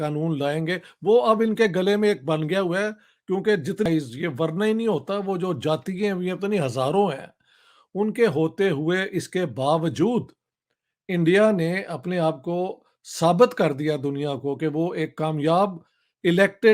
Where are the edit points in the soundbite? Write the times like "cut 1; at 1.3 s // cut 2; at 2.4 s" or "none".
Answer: cut 1; at 3.9 s